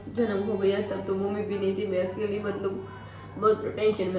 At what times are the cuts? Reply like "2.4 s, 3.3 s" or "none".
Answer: none